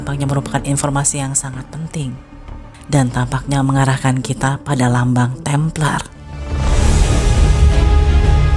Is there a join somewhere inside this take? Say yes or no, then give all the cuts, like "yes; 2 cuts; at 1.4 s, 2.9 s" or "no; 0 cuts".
no; 0 cuts